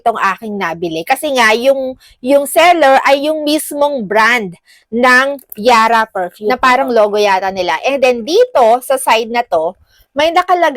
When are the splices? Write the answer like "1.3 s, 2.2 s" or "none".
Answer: 6.4 s